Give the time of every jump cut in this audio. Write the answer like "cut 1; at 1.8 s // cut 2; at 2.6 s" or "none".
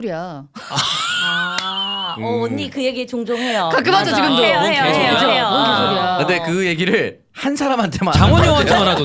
none